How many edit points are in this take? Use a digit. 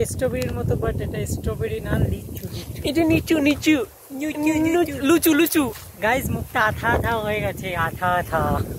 0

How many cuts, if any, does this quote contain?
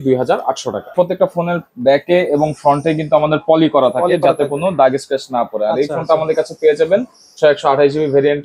1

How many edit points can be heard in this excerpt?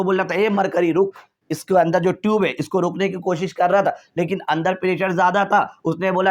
0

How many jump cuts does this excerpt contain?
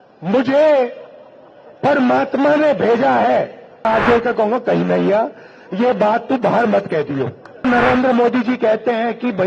2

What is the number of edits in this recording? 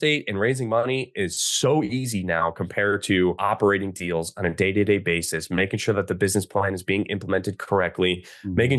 1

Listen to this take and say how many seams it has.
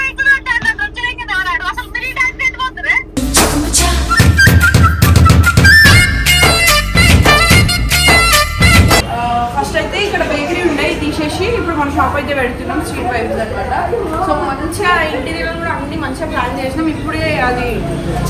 1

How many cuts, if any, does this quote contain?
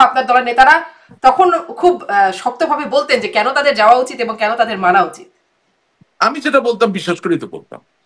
0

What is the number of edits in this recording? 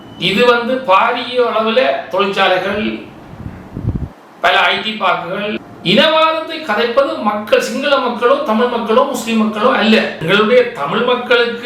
2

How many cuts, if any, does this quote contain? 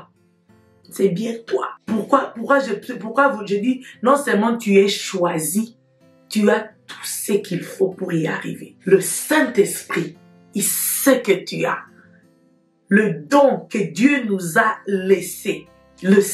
1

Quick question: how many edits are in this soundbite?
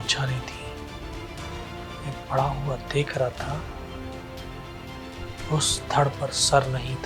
0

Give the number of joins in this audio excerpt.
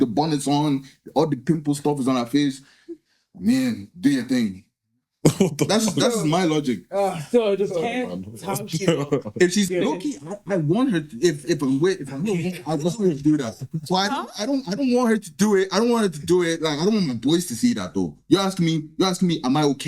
1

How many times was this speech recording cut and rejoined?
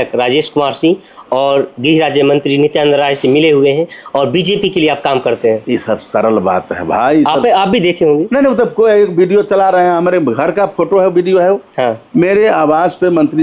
0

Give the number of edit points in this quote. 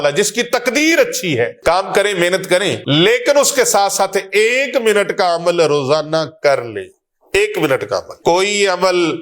3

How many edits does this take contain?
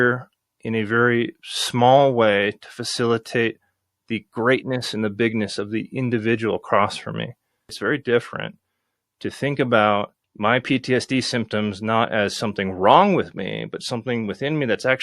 2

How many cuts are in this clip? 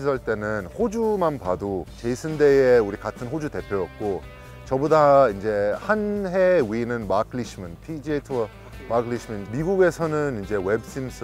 2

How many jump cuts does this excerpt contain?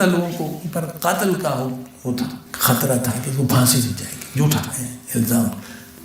1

